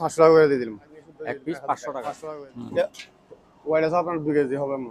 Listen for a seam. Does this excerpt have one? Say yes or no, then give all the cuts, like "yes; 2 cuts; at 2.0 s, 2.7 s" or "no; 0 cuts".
yes; 1 cut; at 2.2 s